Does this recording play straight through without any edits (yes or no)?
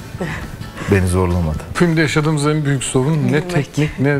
no